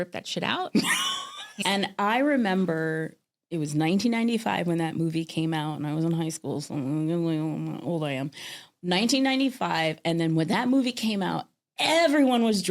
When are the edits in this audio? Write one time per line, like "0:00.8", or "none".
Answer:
0:01.5